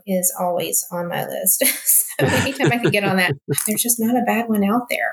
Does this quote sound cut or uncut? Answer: cut